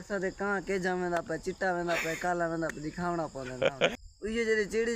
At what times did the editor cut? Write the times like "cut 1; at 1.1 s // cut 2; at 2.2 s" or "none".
cut 1; at 4.0 s